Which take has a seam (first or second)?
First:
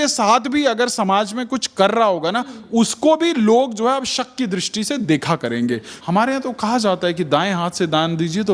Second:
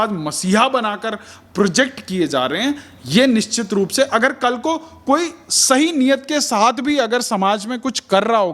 first